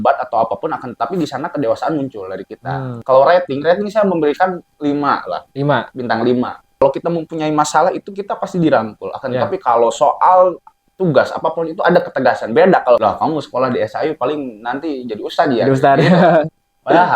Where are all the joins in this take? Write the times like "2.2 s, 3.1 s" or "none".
2.9 s, 6.8 s, 13.0 s